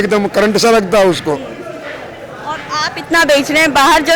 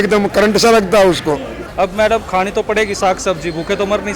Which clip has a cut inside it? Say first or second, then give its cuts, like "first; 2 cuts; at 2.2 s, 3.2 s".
second; 1 cut; at 1.6 s